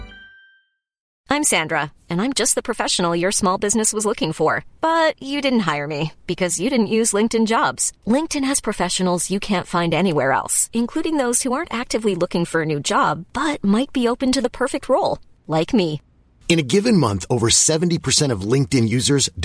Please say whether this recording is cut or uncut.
cut